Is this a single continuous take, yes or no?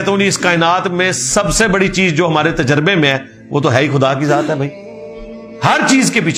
yes